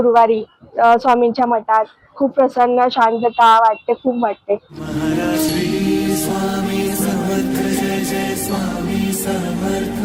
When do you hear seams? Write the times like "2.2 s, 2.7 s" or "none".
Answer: none

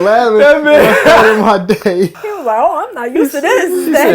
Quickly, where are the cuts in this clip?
2.2 s

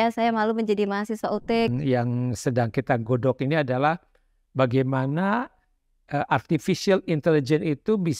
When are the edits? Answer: 1.7 s

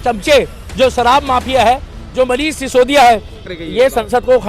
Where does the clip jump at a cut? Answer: 3.4 s

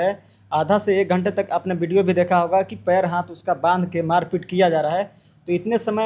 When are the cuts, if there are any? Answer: none

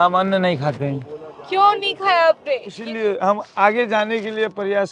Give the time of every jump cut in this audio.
2.8 s

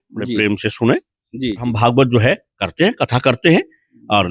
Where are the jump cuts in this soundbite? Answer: 1.7 s

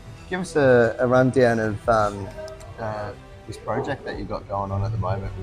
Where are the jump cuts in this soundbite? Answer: none

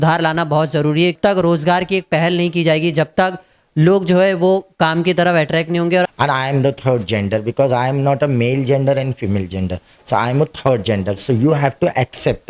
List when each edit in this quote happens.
1.2 s, 6.1 s

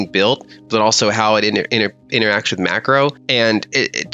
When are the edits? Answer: 3.2 s

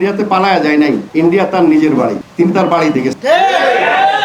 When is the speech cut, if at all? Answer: none

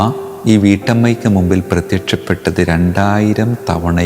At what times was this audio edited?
none

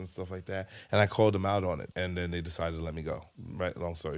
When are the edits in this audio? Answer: 1.9 s, 3.3 s

